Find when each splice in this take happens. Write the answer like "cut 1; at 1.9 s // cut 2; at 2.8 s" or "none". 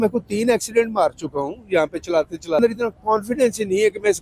cut 1; at 2.6 s